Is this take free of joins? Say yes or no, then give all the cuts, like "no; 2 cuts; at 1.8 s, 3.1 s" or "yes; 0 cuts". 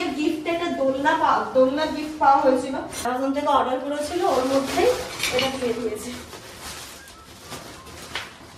no; 1 cut; at 3.0 s